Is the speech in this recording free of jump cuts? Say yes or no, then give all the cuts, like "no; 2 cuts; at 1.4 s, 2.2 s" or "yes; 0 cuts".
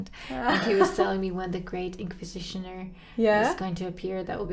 yes; 0 cuts